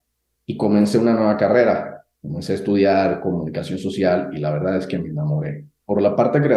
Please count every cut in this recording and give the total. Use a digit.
1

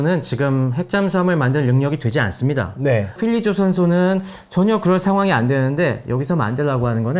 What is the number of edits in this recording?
1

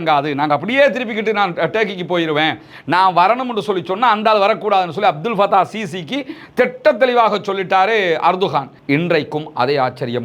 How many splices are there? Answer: 1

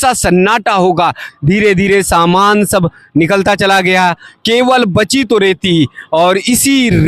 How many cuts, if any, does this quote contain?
1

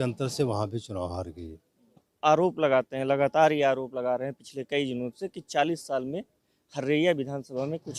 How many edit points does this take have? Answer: 1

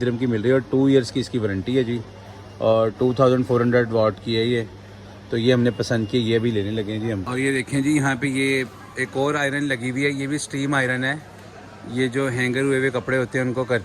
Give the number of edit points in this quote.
0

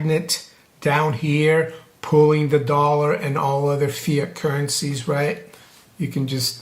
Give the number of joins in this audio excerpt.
0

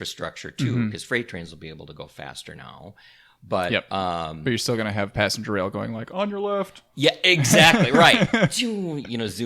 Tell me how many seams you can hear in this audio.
0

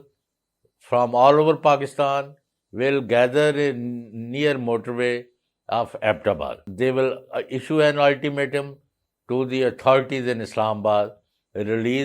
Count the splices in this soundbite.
1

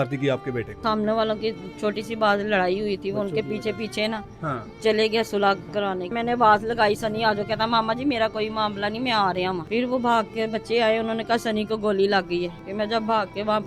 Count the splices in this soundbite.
4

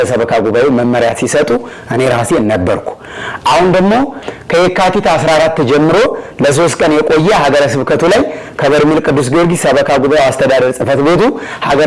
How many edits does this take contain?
0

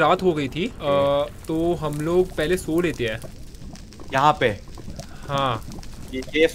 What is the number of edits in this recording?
0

